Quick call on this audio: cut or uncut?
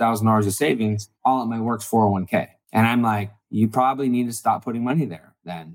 cut